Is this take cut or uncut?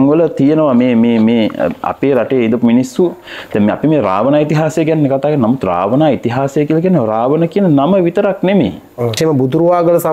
cut